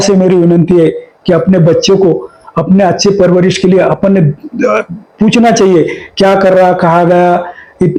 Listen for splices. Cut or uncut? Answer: uncut